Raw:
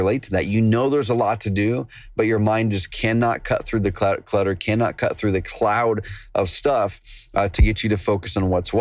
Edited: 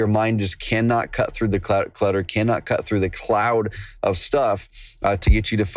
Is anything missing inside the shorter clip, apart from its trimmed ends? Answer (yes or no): no